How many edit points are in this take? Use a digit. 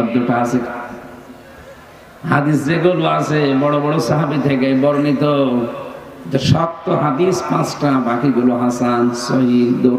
0